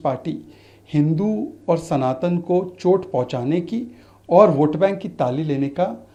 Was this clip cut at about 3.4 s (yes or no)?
no